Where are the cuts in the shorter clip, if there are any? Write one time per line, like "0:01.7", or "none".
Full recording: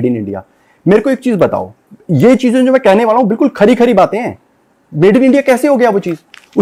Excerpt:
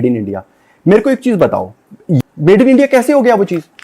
0:02.2